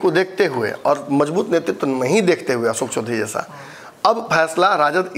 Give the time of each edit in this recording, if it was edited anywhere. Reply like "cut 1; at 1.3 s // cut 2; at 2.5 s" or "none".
none